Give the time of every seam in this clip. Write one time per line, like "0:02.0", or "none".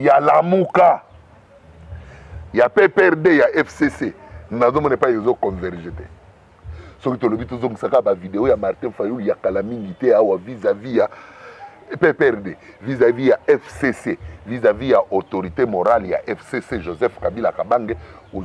none